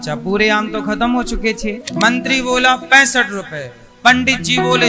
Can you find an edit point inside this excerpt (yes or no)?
yes